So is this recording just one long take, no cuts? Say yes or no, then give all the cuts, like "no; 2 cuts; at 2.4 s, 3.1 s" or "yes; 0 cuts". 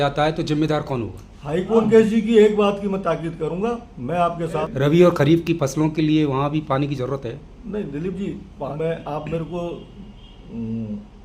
no; 3 cuts; at 1.8 s, 4.6 s, 8.7 s